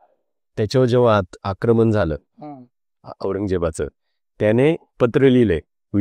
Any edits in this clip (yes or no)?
no